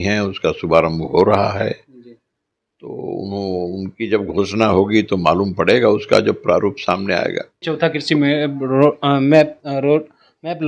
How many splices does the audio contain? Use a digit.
1